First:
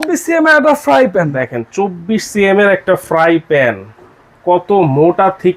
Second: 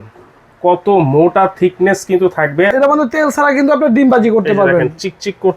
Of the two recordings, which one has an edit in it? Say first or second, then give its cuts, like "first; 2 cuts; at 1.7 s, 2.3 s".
second; 1 cut; at 2.7 s